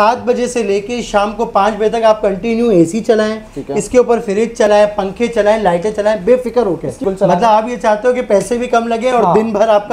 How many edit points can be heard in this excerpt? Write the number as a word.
one